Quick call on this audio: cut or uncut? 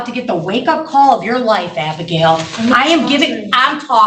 uncut